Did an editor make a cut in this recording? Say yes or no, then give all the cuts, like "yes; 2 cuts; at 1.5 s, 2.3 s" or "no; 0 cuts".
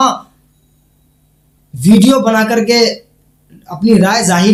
no; 0 cuts